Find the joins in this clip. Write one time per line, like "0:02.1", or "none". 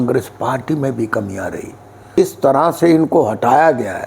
0:02.2